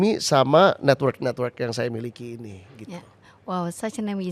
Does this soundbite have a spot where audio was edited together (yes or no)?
no